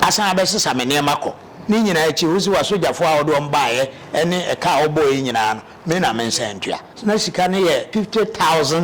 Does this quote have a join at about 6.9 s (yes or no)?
yes